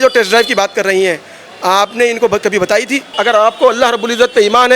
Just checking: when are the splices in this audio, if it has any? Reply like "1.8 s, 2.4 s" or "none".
3.1 s